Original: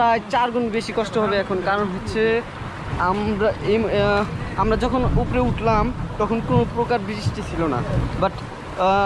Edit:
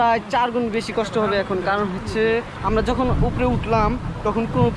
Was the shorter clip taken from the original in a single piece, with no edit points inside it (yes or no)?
no